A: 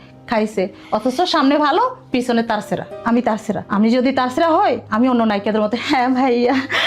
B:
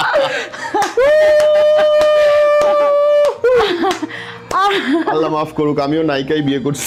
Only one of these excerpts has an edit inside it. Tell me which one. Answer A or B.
A